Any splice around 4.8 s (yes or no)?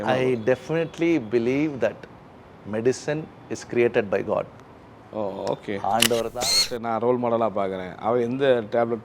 no